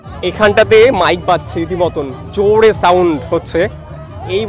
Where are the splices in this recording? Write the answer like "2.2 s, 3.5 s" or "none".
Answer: none